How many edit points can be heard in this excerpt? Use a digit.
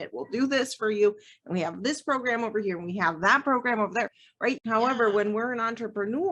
1